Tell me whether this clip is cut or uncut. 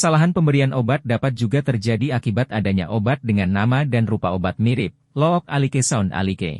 uncut